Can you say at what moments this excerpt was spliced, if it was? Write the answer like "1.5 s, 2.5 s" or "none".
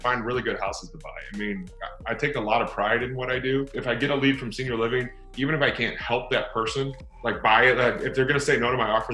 3.7 s